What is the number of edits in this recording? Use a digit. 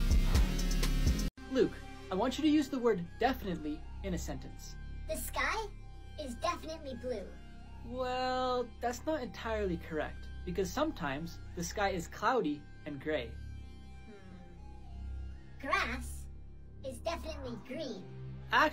1